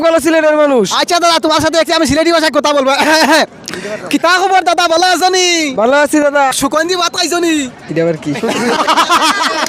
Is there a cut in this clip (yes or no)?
yes